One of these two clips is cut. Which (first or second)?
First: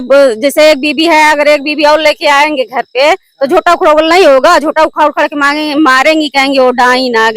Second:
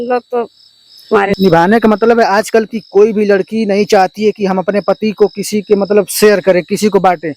second